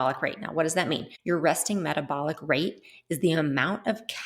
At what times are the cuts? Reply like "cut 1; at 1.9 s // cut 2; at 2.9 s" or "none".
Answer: cut 1; at 1.1 s

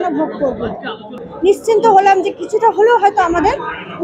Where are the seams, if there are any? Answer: cut 1; at 1.3 s

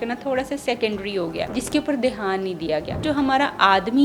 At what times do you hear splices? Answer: cut 1; at 1.5 s // cut 2; at 3.1 s

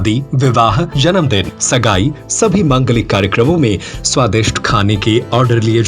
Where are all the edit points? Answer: cut 1; at 1.2 s

